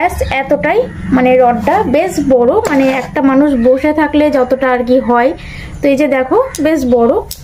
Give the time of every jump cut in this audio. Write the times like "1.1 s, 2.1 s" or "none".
none